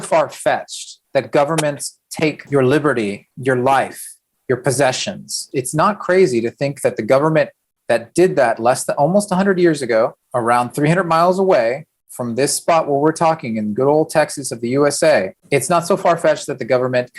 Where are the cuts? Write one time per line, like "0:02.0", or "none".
0:02.4
0:05.5
0:10.2
0:15.4